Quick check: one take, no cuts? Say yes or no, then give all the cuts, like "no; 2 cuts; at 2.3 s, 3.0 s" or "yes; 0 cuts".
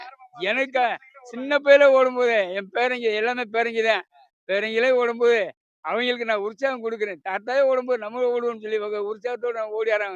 yes; 0 cuts